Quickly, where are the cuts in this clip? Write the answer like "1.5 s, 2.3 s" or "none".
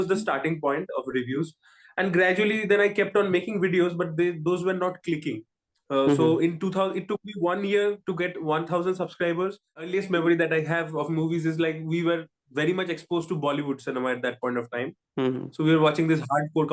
9.9 s